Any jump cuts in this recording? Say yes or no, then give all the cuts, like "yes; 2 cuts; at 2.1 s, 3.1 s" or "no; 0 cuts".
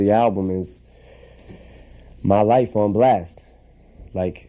no; 0 cuts